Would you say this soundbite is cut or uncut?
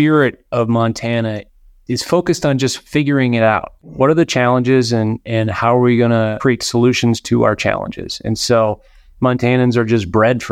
cut